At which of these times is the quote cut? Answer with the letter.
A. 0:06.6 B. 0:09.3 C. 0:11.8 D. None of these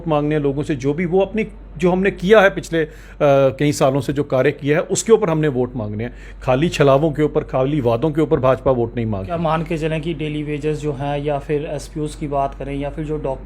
B